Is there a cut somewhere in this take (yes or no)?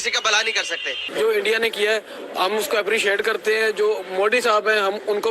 yes